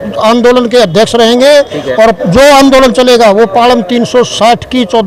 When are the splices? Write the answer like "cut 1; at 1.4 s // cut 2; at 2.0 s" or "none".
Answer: none